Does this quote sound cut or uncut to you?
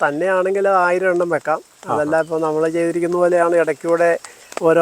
uncut